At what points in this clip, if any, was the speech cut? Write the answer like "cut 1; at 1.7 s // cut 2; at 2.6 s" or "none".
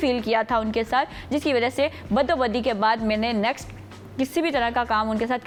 none